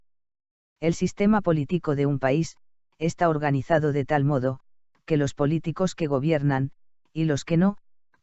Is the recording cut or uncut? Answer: cut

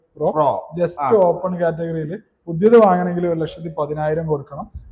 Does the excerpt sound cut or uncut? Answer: uncut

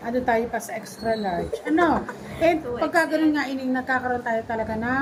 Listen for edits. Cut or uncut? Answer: uncut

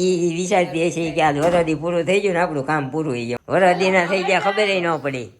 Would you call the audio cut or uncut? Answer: cut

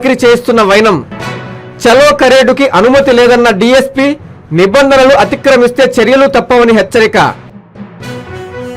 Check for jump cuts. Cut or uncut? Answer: cut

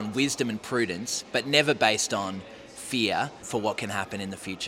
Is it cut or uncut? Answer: cut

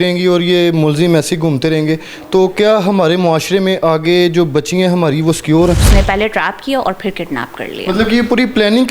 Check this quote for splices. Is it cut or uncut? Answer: cut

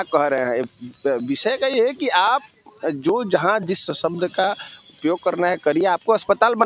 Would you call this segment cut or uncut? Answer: uncut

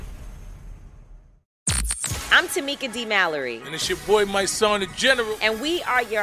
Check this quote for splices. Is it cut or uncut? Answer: cut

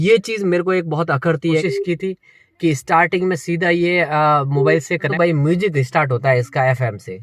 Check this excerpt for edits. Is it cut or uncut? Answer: cut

